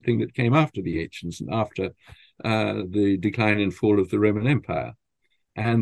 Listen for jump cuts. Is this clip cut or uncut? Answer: uncut